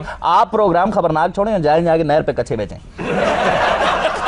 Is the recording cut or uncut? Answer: uncut